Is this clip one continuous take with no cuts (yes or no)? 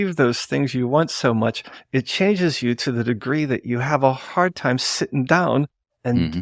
yes